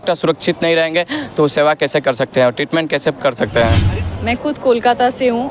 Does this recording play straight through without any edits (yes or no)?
no